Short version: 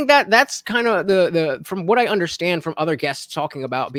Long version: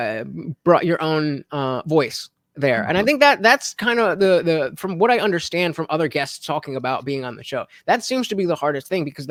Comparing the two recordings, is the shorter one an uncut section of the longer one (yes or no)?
yes